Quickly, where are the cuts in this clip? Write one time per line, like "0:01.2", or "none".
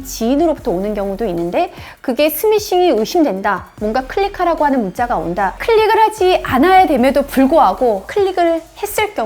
0:05.6